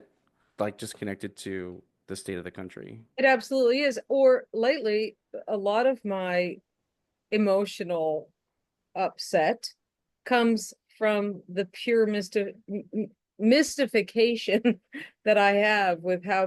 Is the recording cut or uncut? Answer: uncut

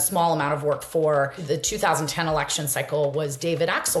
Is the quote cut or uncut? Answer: cut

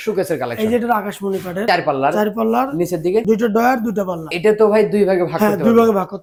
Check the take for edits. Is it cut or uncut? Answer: uncut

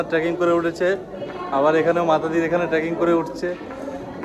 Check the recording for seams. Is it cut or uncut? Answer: uncut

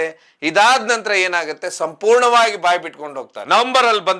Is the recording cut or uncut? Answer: cut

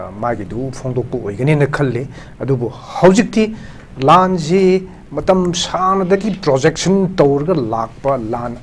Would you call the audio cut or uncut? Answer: uncut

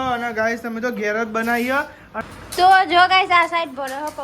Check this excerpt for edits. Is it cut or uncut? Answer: cut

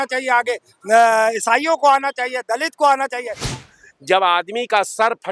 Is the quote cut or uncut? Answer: cut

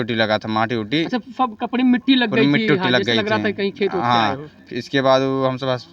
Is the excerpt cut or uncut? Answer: uncut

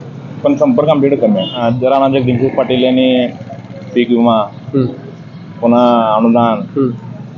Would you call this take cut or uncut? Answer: cut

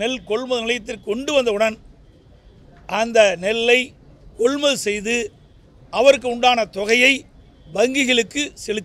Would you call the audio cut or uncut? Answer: uncut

